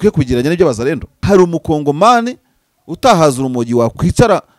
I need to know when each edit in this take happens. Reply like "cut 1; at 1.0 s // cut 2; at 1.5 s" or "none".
cut 1; at 1.1 s

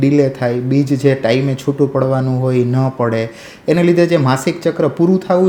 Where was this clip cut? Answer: none

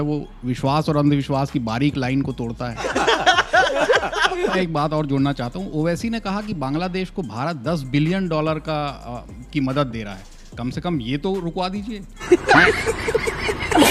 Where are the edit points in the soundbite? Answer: cut 1; at 4.5 s

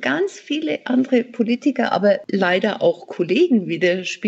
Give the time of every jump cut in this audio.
cut 1; at 2.2 s

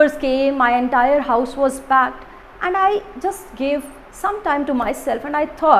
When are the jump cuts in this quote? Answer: none

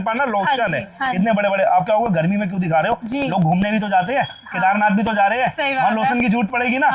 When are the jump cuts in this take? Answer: none

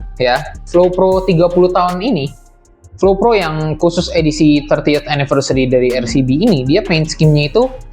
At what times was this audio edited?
none

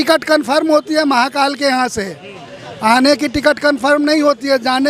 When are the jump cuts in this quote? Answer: none

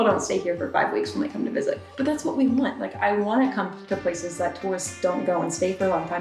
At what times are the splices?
cut 1; at 1.9 s

